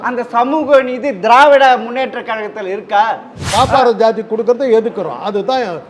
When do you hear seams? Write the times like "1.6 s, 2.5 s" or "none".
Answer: 3.4 s